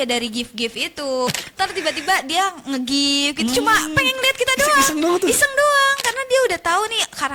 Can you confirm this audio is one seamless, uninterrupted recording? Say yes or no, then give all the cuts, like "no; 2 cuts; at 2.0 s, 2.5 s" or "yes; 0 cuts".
no; 1 cut; at 1.3 s